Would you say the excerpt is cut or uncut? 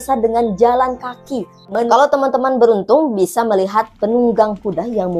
cut